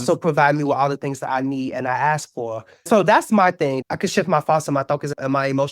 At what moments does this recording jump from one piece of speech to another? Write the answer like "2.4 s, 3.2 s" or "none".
2.9 s, 3.8 s